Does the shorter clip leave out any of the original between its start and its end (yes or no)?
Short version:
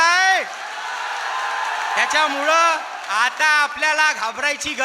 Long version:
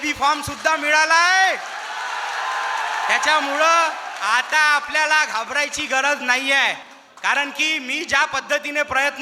no